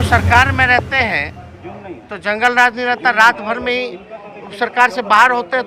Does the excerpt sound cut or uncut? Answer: uncut